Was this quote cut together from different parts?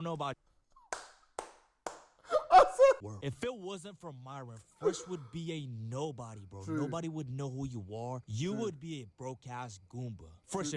yes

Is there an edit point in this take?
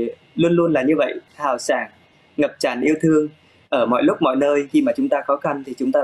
no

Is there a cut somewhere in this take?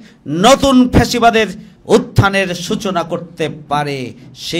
yes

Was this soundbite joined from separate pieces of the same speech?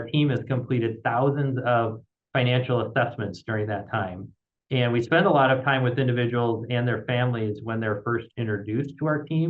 no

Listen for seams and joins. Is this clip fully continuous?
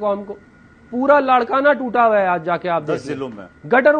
yes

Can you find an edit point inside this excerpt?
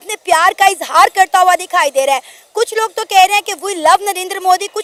no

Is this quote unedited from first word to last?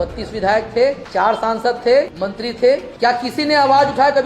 no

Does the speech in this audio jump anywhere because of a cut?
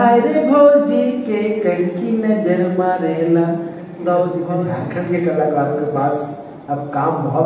yes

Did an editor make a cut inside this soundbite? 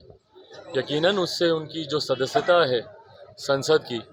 no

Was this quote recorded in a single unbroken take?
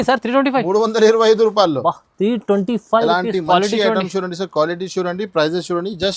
yes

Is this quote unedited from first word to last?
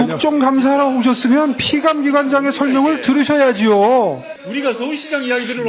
no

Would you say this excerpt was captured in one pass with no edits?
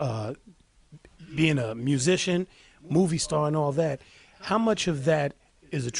no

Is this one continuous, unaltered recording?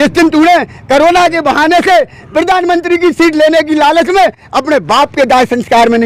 yes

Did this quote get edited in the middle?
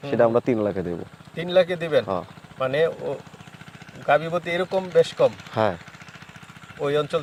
no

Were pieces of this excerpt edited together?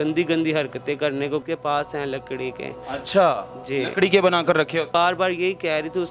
yes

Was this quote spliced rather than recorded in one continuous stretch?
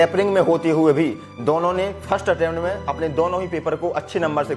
no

